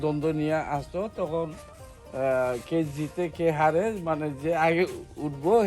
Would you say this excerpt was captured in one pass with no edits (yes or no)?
yes